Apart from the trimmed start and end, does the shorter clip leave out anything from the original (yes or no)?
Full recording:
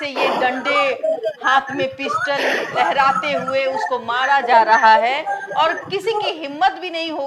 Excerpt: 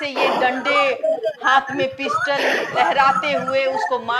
no